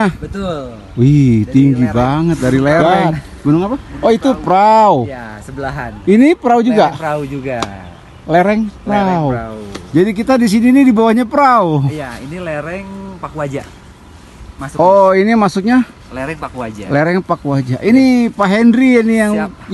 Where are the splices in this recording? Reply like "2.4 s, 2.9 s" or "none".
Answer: 3.9 s

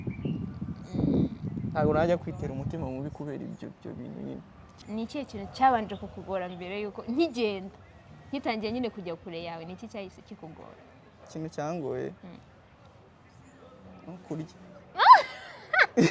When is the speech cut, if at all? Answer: 4.8 s

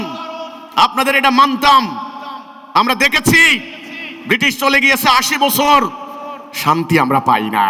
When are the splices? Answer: none

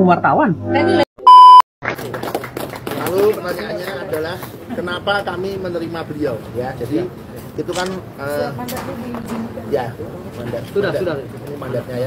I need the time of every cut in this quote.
1.1 s, 1.8 s

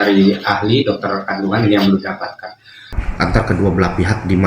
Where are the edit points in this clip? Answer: 2.9 s

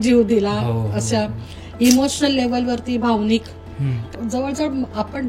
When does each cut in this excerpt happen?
4.0 s

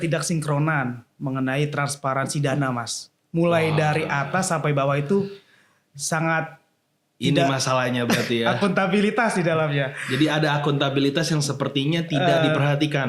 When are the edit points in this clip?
none

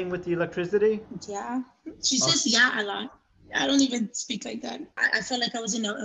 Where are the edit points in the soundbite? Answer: 5.0 s

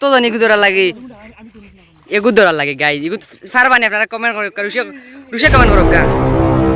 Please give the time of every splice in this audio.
5.7 s

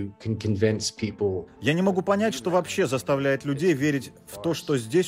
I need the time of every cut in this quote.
1.4 s

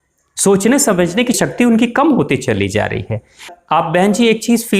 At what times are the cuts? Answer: 1.4 s, 3.5 s

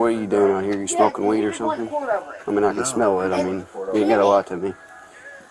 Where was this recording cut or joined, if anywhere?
none

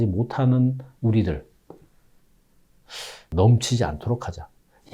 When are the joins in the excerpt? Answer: 3.3 s

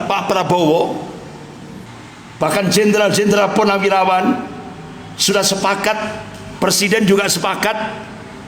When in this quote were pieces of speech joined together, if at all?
1.9 s

